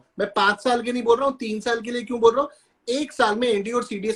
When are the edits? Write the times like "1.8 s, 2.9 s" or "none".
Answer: none